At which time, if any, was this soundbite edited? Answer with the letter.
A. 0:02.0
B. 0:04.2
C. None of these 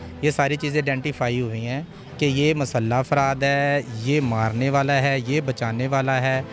C